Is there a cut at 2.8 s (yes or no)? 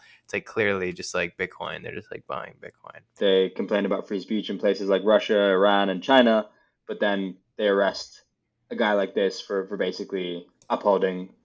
yes